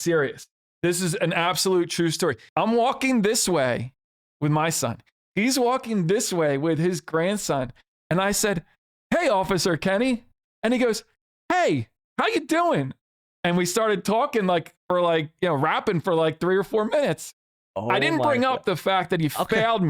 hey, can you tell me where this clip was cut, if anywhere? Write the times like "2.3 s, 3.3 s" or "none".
2.4 s